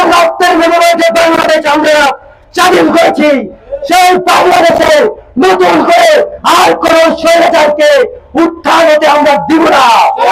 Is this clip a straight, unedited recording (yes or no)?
yes